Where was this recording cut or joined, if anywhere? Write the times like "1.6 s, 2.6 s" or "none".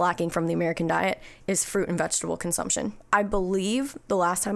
3.0 s